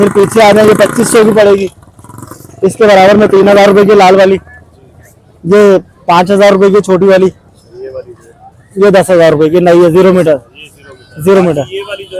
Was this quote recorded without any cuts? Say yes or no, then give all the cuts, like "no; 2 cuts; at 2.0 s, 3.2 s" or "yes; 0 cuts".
yes; 0 cuts